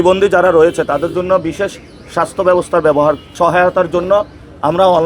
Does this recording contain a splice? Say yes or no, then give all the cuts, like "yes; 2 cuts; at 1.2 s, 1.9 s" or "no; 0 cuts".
yes; 1 cut; at 3.3 s